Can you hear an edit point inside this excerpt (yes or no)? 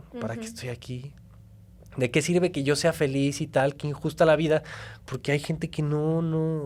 no